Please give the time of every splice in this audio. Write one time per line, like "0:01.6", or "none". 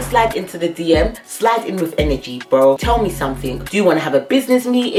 none

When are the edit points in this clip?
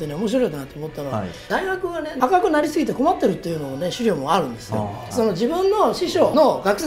0:05.0

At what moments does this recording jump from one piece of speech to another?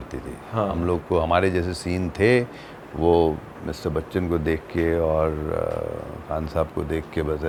none

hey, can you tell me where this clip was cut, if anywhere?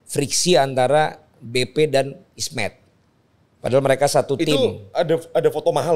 none

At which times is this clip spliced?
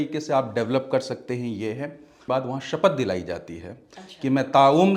0:02.2

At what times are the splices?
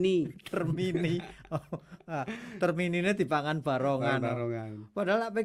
none

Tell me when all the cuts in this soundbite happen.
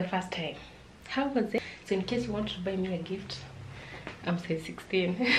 0:01.6

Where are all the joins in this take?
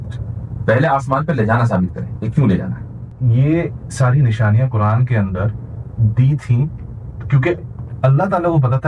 0:03.2

